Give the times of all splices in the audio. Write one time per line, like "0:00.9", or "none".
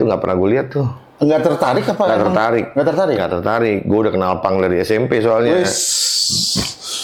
none